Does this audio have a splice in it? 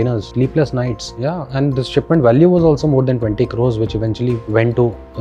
no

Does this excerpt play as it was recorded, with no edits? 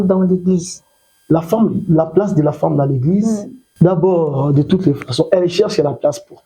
no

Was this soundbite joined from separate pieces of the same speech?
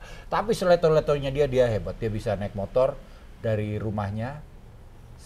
no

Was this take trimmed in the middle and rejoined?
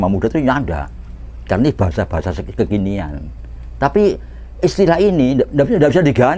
no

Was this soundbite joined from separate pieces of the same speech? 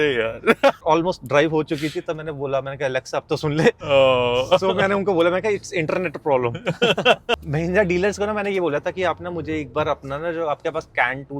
no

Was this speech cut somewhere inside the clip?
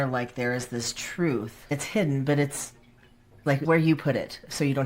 yes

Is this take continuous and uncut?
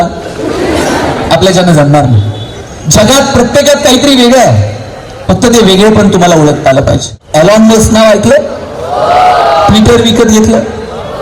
no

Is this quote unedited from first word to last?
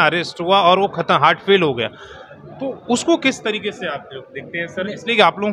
yes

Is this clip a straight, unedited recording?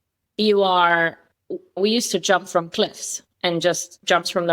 no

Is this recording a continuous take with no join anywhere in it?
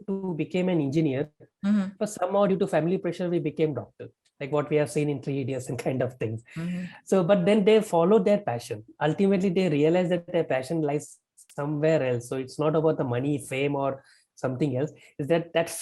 yes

